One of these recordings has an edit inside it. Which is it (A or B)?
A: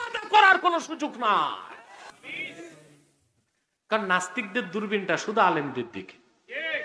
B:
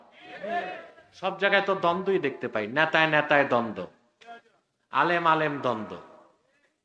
A